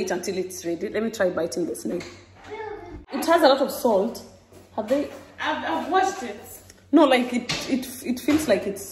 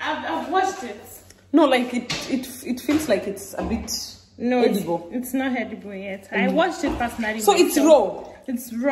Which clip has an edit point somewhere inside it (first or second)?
first